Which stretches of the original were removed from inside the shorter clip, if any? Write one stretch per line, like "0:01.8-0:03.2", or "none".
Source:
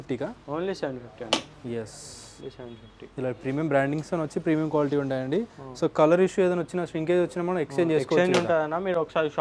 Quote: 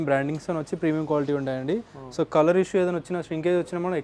none